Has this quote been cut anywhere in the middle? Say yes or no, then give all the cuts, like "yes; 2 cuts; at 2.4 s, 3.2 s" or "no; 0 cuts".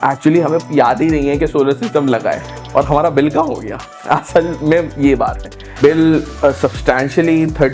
yes; 1 cut; at 5.8 s